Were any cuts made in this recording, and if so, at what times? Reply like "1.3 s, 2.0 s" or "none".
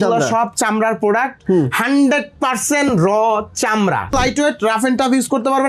4.1 s